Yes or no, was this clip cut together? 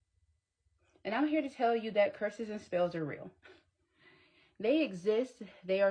no